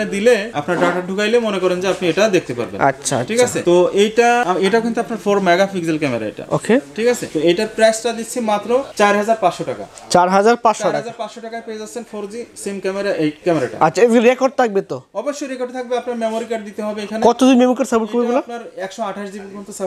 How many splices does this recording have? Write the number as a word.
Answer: zero